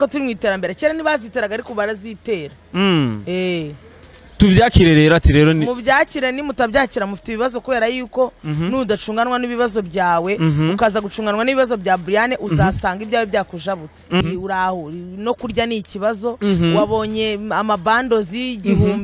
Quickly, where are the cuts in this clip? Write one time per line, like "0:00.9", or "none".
0:14.2